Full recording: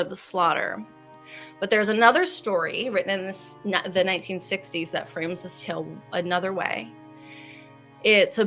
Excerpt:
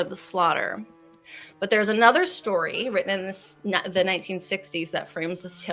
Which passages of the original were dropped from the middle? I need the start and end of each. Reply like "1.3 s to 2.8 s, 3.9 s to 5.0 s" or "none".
none

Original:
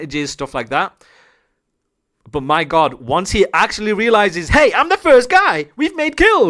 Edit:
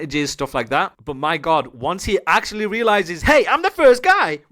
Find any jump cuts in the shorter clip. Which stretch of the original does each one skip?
1.0 s to 2.2 s

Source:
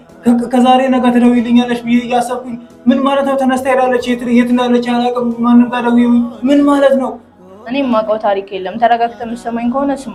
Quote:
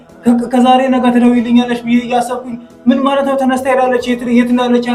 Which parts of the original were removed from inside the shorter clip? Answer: none

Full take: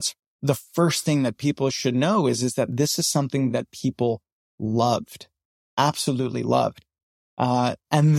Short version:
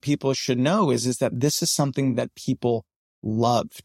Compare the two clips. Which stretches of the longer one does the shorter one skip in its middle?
none

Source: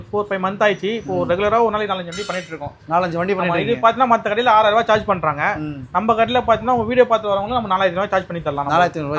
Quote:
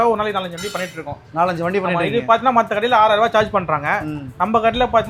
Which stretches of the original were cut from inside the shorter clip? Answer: none

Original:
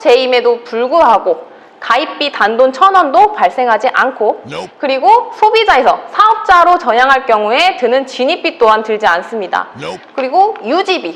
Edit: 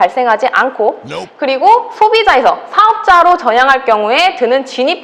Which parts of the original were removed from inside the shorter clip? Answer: none

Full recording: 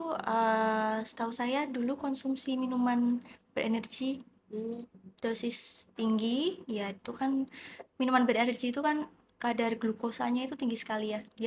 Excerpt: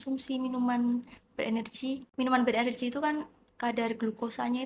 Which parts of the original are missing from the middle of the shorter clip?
4.2 s to 7.9 s

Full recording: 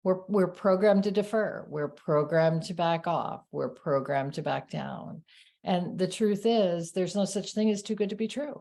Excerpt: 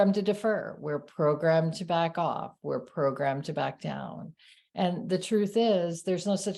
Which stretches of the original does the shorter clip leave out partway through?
none

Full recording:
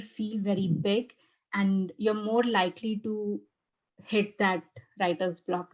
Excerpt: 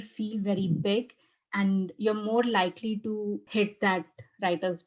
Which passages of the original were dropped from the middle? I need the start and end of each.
3.4 s to 4.0 s

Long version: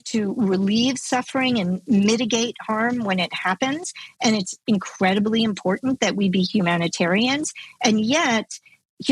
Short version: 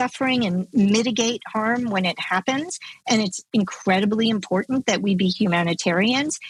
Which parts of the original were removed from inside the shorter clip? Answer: none

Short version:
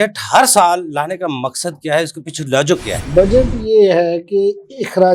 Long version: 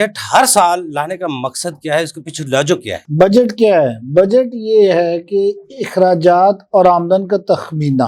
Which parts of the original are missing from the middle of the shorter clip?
3.0 s to 4.0 s

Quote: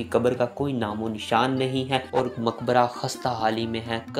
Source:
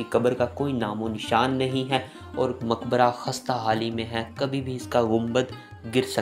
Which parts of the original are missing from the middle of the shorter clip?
2.1 s to 2.3 s

